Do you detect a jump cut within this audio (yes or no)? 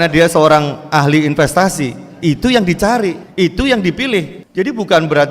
yes